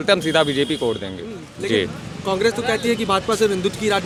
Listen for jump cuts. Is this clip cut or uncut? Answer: uncut